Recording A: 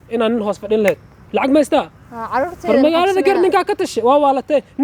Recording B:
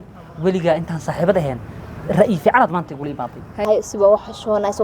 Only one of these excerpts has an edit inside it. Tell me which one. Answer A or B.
B